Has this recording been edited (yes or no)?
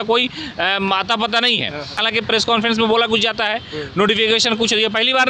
yes